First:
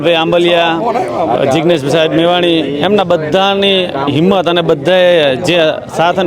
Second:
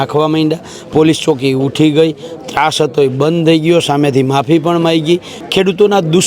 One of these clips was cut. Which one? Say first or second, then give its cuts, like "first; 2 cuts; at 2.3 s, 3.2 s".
second; 1 cut; at 5.3 s